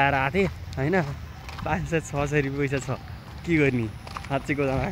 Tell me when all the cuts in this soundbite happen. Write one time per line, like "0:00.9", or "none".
none

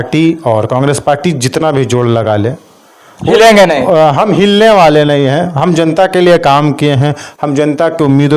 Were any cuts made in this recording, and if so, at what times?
none

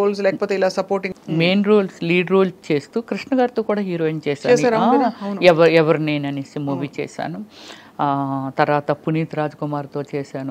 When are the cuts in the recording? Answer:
0:01.1

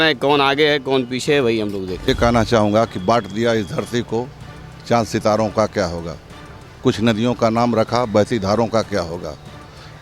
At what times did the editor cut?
0:02.1

